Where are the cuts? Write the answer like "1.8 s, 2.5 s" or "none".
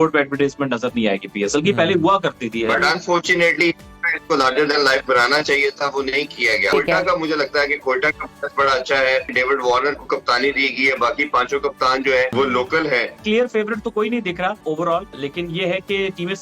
2.8 s, 6.7 s, 9.3 s, 12.3 s, 13.2 s, 15.0 s